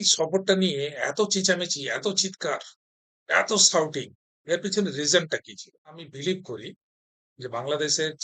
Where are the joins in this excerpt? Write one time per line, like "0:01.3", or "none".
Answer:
0:06.1